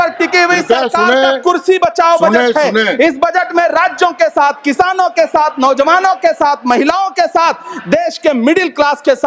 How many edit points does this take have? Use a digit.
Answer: 0